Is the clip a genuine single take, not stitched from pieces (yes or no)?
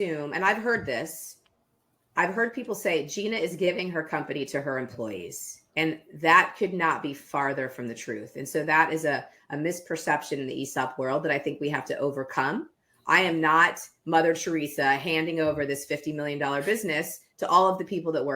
yes